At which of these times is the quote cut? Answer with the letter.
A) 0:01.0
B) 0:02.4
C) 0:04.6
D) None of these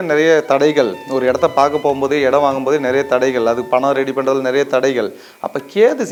D